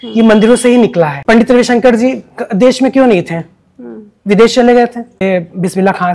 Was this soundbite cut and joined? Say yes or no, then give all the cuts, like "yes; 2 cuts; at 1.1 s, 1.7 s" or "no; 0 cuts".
yes; 2 cuts; at 1.2 s, 5.1 s